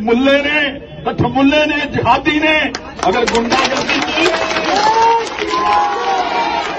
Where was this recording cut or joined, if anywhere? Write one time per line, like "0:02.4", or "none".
none